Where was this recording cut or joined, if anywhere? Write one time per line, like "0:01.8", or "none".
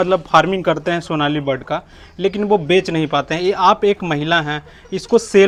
none